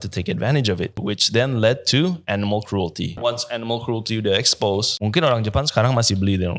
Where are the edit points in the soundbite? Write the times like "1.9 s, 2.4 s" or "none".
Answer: 1.0 s, 3.2 s, 4.9 s